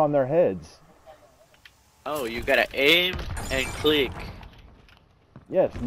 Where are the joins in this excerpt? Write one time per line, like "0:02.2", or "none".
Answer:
none